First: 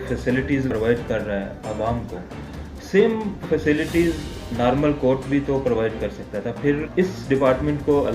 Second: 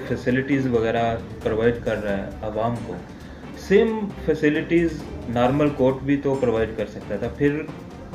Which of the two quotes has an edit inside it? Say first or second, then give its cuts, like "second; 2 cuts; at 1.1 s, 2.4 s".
first; 2 cuts; at 0.7 s, 6.9 s